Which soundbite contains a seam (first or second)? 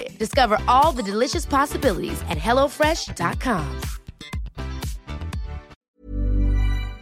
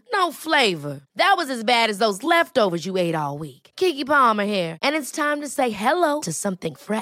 first